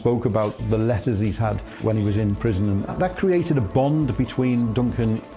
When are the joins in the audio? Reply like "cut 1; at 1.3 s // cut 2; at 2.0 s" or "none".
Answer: cut 1; at 1.8 s // cut 2; at 2.9 s